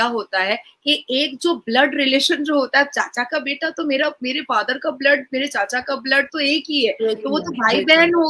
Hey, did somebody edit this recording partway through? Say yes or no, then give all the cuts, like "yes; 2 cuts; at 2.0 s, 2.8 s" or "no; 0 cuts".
no; 0 cuts